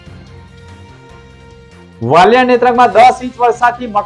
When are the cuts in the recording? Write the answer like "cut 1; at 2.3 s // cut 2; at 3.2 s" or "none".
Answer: cut 1; at 1.9 s